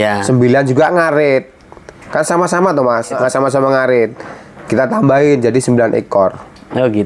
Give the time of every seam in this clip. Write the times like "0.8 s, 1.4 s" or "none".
3.2 s